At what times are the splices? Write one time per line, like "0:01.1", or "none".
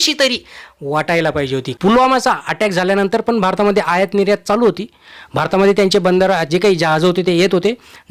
0:01.7